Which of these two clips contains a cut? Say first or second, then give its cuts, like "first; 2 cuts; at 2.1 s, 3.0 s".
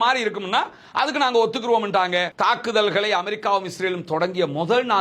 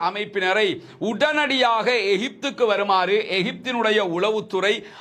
first; 1 cut; at 2.3 s